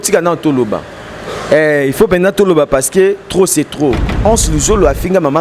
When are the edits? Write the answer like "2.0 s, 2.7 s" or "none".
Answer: 4.1 s